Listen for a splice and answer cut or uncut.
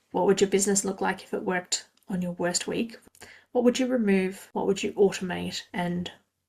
cut